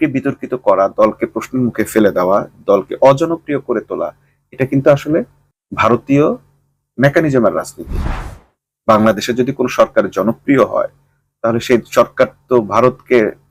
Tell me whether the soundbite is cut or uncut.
uncut